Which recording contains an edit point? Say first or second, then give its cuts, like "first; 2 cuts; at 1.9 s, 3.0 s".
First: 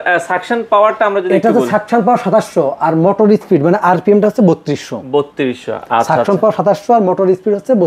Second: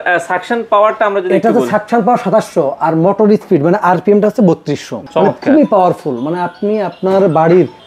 second; 1 cut; at 4.9 s